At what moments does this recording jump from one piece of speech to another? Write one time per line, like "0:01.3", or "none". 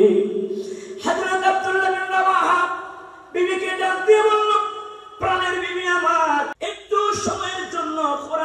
0:06.5